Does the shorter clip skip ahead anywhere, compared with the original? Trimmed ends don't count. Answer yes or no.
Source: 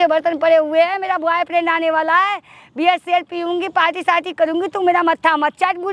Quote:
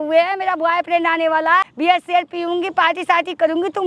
yes